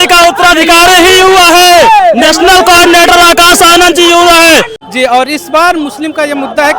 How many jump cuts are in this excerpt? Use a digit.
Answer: 1